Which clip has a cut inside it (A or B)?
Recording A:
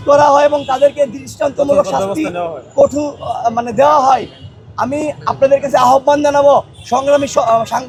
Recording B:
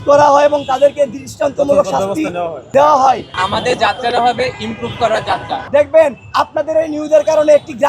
B